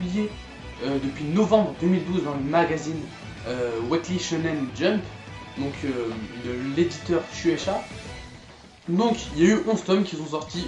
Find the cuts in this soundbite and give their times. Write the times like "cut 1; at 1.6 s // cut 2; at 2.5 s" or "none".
cut 1; at 7.8 s